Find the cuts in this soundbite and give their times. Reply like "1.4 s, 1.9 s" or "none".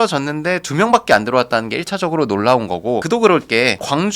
3.0 s

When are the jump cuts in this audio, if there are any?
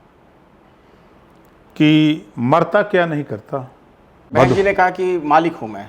4.2 s

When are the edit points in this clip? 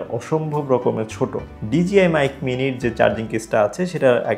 1.4 s

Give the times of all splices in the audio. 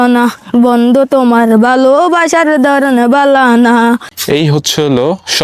4.1 s

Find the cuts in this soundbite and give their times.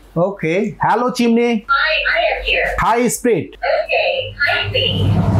1.7 s, 2.8 s, 3.5 s

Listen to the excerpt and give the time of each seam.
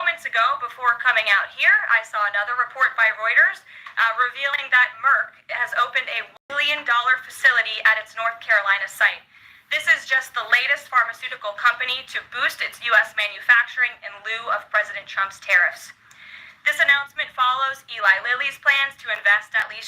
6.3 s

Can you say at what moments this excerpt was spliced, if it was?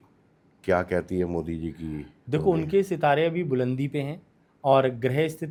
none

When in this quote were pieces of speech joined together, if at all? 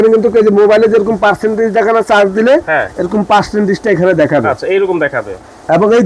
none

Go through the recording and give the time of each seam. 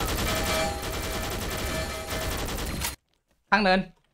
3.0 s

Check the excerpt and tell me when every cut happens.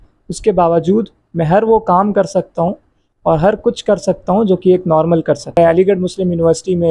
5.6 s

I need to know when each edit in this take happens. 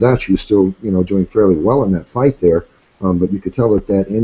1.3 s

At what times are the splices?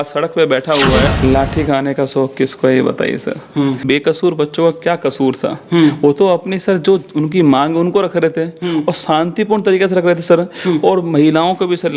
1.1 s, 3.9 s

